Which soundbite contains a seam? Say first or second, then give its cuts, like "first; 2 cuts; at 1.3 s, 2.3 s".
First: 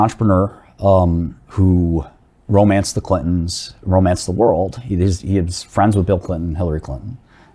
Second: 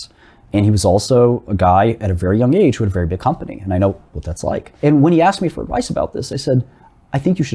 second; 1 cut; at 4.7 s